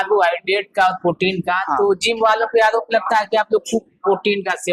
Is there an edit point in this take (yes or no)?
no